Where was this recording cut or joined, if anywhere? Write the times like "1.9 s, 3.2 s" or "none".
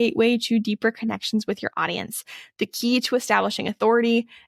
none